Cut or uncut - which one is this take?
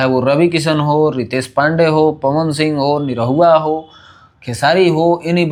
uncut